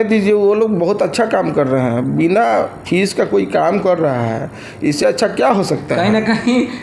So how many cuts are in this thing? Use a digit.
0